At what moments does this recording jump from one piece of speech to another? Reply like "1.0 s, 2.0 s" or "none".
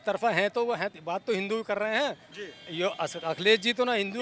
none